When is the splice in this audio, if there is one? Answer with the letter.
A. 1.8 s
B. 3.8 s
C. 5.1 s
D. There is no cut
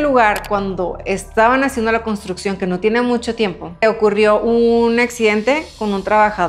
D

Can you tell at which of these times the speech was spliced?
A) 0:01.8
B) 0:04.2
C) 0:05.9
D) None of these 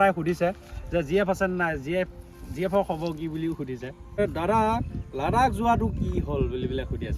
B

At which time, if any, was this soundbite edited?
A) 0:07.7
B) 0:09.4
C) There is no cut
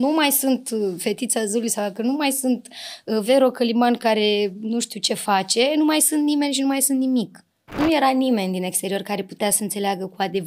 A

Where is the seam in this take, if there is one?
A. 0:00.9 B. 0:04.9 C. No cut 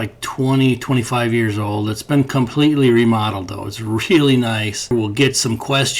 B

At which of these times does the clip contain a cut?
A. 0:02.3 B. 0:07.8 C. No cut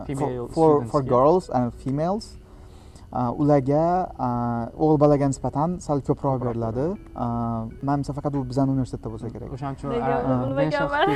C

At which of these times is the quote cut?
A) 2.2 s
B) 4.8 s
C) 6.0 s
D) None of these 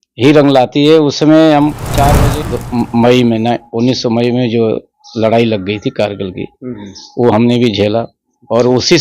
A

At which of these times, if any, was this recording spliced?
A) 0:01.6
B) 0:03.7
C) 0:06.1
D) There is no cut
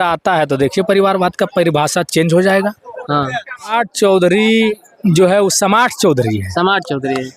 B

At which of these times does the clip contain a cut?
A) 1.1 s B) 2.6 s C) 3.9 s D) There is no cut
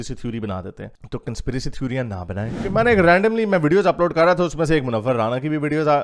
B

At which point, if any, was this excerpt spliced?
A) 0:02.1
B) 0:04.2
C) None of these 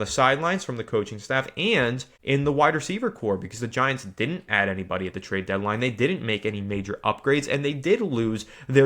A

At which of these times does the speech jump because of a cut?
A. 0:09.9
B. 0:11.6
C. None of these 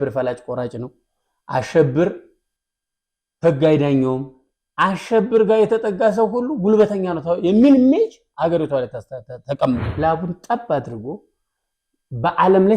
A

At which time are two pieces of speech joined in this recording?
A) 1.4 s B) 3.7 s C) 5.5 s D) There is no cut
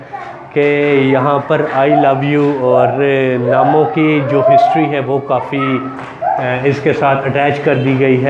D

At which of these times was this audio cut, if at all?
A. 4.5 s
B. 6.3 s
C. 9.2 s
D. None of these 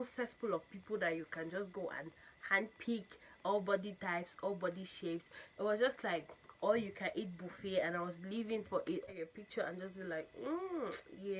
C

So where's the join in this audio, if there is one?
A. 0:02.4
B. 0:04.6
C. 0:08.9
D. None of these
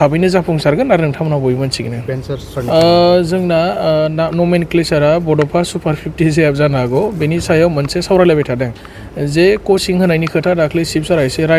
A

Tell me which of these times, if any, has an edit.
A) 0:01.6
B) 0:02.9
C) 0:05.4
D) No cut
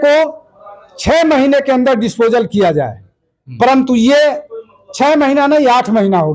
D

